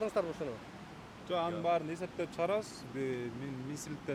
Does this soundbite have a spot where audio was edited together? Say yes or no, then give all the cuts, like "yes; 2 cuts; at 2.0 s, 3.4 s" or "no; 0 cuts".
no; 0 cuts